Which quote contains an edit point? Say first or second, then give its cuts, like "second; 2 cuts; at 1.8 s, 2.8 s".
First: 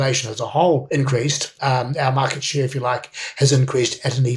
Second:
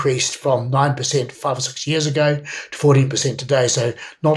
first; 1 cut; at 1.2 s